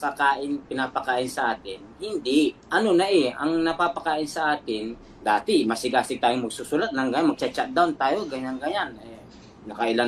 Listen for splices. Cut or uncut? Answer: cut